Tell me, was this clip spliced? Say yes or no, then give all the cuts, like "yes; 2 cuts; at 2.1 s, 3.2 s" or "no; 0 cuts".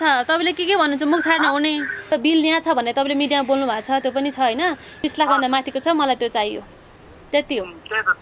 yes; 2 cuts; at 2.1 s, 5.0 s